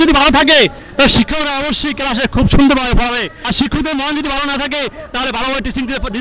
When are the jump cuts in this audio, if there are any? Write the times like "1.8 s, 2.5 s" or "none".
3.3 s